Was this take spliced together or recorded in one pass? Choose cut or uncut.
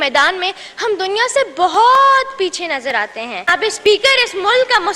cut